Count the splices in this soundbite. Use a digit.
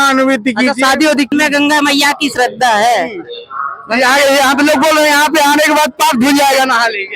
1